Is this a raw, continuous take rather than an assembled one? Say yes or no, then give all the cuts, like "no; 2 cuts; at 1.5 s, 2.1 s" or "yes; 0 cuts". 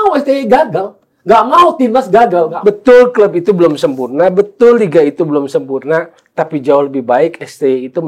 no; 1 cut; at 2.5 s